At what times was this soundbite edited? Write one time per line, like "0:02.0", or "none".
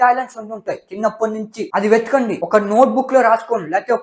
none